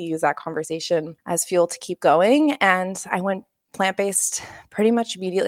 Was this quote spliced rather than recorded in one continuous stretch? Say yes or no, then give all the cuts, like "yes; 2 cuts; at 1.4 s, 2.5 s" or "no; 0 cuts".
yes; 1 cut; at 1.2 s